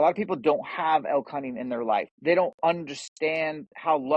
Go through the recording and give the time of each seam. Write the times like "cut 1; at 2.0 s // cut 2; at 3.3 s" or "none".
cut 1; at 2.1 s